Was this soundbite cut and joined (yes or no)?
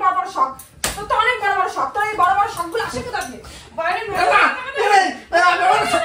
no